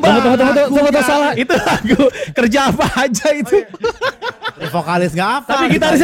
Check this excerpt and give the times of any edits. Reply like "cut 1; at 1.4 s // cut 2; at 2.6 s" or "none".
cut 1; at 1.3 s // cut 2; at 4.5 s